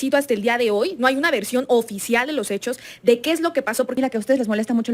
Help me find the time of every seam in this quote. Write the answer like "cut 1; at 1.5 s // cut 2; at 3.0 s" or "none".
cut 1; at 4.0 s